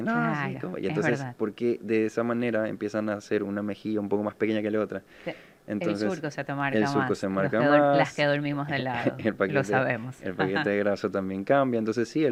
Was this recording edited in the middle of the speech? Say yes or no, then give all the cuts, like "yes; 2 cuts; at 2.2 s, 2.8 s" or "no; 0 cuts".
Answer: no; 0 cuts